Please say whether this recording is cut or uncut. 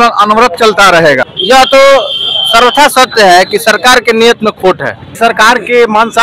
cut